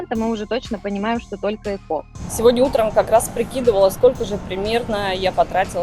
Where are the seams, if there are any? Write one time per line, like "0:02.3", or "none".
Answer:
0:02.1